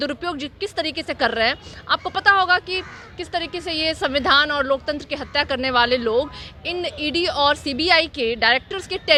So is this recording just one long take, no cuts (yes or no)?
yes